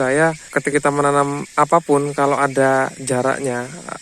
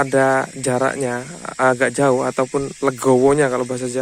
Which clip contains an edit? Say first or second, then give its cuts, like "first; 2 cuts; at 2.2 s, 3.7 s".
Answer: first; 2 cuts; at 0.7 s, 1.4 s